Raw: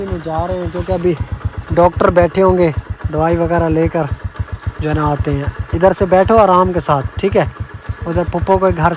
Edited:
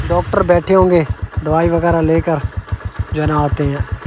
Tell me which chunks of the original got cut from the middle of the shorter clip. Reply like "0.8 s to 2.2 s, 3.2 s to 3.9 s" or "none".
none